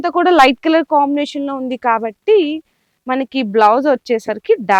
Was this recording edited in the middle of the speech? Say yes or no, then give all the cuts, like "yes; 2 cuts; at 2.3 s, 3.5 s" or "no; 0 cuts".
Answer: no; 0 cuts